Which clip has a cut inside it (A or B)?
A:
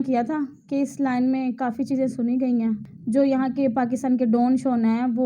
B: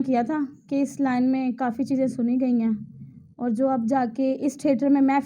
A